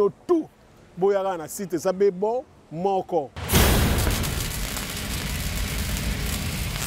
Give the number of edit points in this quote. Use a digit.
0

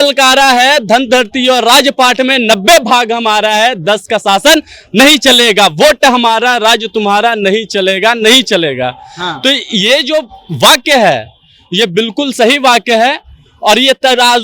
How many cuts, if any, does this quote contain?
0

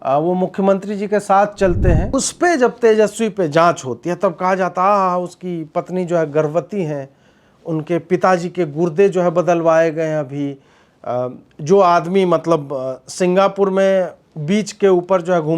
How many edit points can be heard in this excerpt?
1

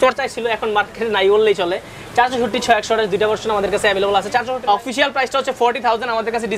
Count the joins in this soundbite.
1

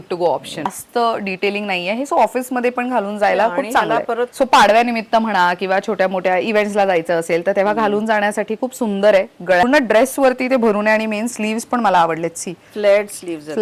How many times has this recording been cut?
3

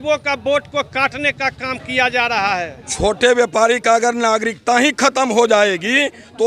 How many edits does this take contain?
1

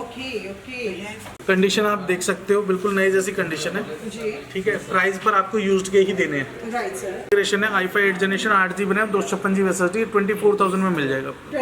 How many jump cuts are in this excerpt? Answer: 2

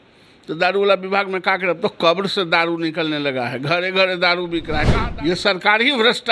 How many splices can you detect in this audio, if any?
1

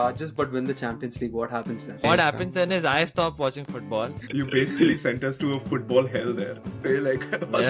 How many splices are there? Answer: 2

